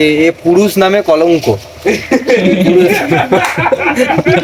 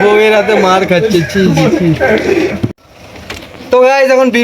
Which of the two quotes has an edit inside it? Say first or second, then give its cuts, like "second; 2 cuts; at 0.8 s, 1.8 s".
second; 1 cut; at 2.7 s